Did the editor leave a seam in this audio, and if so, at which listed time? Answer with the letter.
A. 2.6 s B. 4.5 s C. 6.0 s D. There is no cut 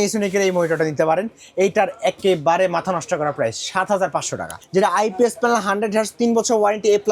B